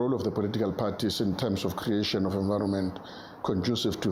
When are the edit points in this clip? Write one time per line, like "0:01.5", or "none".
none